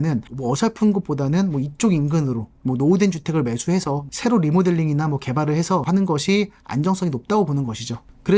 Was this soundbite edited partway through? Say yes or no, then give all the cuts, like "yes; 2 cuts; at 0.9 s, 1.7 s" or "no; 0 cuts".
no; 0 cuts